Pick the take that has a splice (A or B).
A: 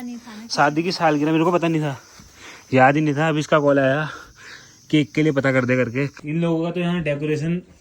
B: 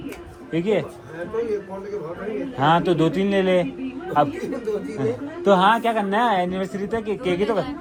A